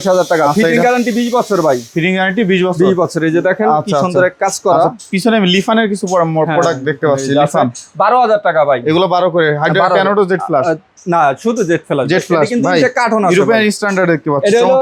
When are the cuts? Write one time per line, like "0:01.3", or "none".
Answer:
none